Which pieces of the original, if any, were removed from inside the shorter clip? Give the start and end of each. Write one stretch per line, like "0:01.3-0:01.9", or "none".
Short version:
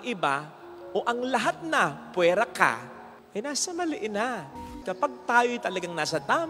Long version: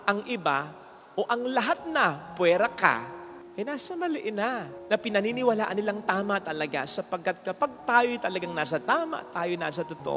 0:04.9-0:07.2